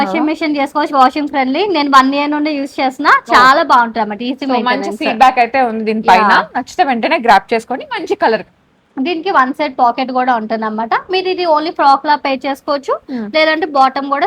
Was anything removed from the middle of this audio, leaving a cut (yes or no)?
no